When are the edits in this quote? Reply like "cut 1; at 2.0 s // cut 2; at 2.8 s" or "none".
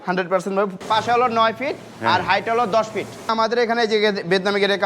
cut 1; at 0.8 s // cut 2; at 3.3 s